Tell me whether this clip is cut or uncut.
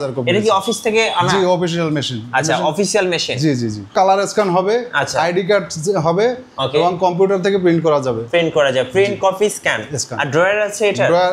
cut